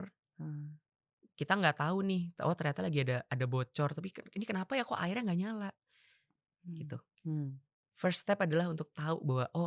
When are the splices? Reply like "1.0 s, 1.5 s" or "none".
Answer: none